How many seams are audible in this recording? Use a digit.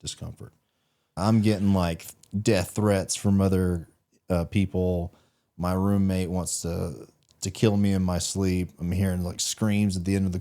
1